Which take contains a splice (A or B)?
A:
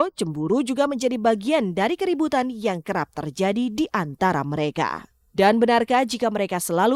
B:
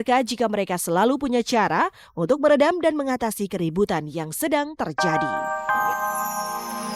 B